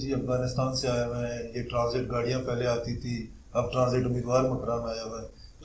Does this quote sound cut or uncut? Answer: uncut